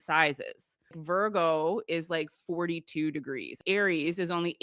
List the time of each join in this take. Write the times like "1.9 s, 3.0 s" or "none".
1.0 s, 3.6 s